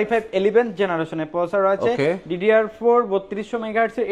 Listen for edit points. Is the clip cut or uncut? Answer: uncut